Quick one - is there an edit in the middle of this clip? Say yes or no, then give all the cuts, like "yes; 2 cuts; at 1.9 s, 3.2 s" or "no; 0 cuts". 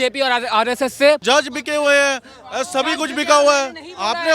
yes; 1 cut; at 1.2 s